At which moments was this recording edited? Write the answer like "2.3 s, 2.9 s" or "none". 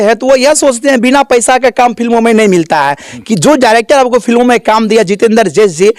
none